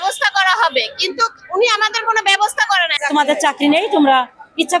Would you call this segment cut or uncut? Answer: cut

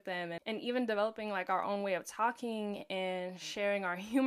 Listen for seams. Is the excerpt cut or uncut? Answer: uncut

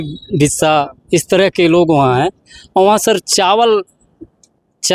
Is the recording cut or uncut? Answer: uncut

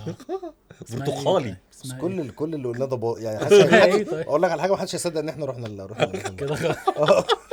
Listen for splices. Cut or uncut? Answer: uncut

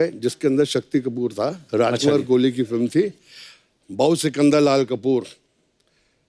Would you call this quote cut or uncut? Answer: uncut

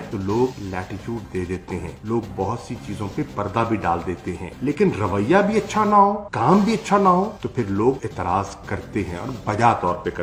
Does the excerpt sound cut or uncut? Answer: uncut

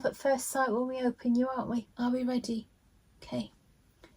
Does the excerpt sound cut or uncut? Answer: cut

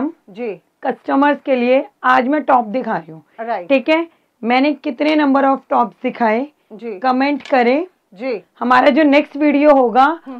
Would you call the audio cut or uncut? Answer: uncut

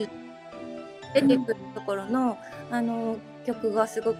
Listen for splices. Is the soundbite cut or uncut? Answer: uncut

